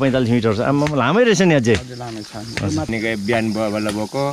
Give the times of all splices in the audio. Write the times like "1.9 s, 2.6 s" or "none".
2.9 s